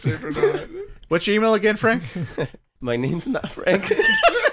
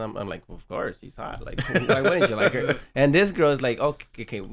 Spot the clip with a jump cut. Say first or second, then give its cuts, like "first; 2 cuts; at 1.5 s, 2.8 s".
first; 1 cut; at 2.6 s